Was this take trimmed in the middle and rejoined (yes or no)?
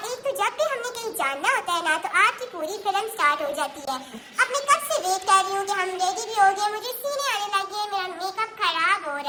no